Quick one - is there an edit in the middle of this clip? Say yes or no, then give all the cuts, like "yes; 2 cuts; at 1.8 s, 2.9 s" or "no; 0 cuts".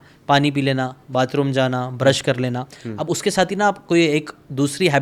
no; 0 cuts